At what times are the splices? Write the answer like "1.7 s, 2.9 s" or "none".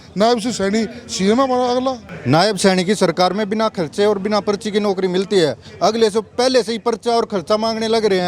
2.1 s